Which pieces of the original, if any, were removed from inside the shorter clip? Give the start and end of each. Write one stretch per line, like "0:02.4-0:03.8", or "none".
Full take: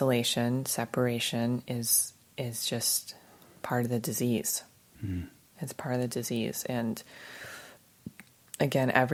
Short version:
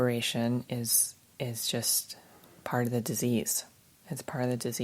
0:04.9-0:05.4